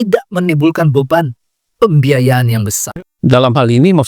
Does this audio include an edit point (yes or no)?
yes